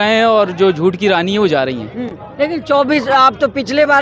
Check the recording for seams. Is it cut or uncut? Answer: uncut